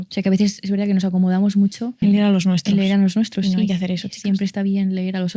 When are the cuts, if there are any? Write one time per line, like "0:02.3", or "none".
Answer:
0:02.0

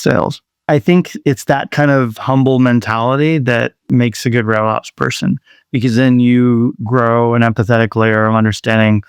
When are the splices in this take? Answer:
0:01.2

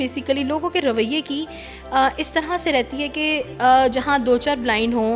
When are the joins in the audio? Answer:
none

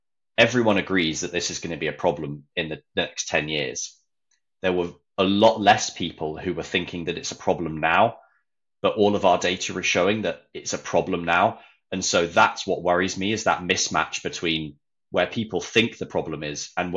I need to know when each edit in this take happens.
none

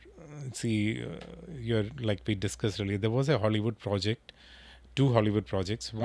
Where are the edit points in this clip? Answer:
none

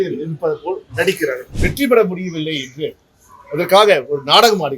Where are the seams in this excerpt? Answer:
0:01.5

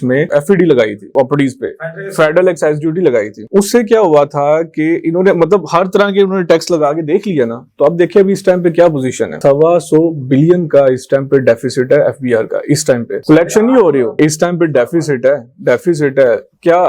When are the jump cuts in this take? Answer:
none

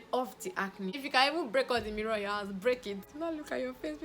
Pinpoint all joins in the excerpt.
0:01.0
0:03.1

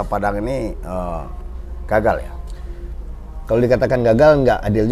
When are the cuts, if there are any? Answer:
none

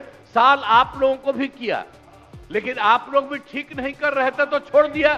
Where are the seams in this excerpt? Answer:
none

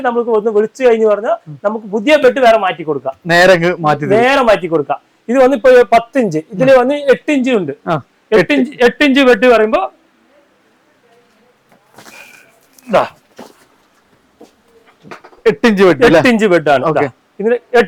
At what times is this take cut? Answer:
none

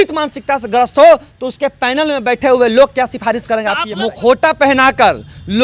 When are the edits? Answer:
0:03.8

